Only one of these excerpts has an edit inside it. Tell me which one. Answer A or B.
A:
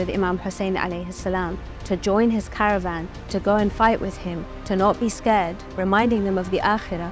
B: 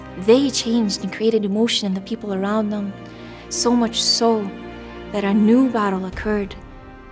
A